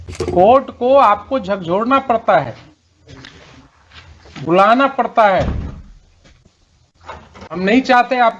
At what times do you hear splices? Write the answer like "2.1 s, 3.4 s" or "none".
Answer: 7.5 s